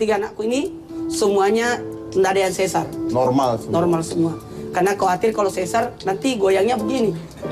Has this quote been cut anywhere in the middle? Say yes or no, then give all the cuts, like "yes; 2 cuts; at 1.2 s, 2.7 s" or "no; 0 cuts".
no; 0 cuts